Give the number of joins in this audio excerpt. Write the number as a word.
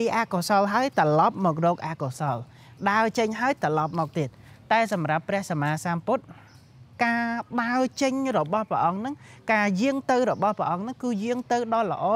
zero